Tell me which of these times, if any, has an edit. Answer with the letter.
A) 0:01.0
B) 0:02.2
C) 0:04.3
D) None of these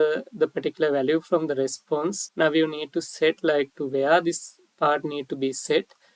B